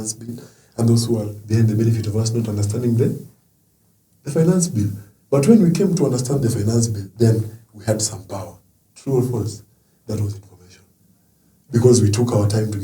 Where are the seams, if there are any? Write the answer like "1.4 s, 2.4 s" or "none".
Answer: none